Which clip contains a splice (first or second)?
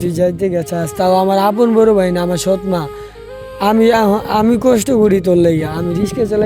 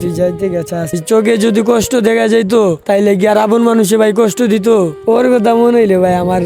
second